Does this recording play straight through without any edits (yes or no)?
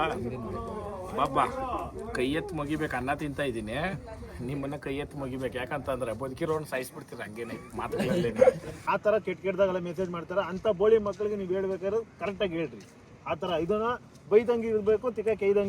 no